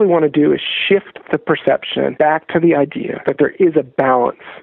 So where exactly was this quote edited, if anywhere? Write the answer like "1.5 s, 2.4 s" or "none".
2.1 s, 3.1 s